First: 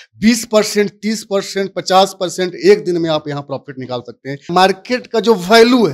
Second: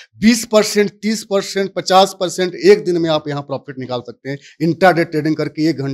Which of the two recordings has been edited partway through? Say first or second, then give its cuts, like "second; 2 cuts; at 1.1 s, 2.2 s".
first; 1 cut; at 4.5 s